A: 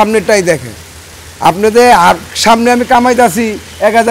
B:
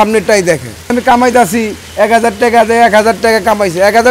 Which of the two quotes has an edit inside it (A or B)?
B